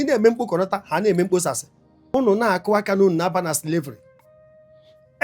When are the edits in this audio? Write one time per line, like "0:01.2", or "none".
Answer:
0:02.1